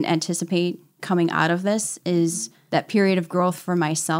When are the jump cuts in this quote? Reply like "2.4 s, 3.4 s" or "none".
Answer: 0.9 s, 2.5 s